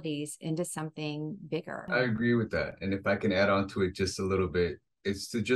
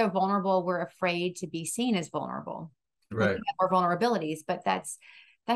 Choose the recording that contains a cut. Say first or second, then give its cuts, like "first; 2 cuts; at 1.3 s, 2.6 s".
first; 1 cut; at 1.9 s